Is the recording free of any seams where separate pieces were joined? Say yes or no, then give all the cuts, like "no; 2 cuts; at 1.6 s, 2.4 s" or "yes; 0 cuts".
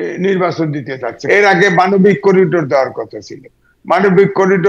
no; 1 cut; at 1.2 s